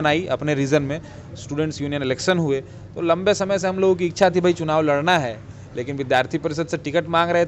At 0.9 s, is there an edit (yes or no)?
no